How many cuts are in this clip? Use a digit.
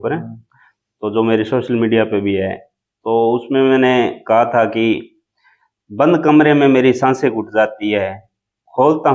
0